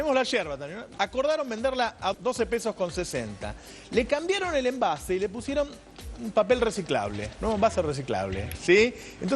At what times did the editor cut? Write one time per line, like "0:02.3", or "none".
0:02.1